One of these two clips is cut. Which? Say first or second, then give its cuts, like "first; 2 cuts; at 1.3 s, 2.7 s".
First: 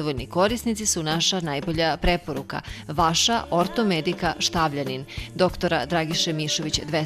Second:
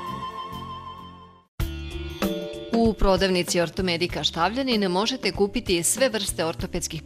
second; 1 cut; at 1.5 s